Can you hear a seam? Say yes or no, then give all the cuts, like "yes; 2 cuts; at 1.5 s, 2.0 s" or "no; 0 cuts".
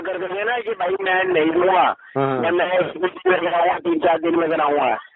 no; 0 cuts